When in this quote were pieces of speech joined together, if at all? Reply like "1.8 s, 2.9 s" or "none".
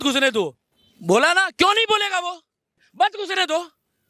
2.8 s